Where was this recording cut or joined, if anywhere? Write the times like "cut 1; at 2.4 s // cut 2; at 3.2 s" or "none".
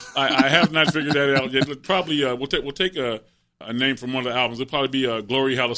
cut 1; at 1.8 s // cut 2; at 3.5 s